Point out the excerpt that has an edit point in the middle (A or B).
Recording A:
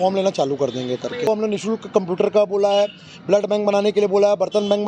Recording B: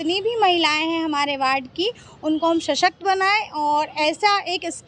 A